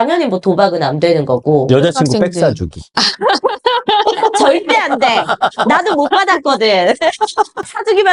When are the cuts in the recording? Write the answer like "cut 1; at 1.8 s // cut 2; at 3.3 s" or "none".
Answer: none